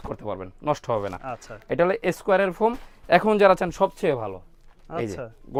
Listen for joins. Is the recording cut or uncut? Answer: uncut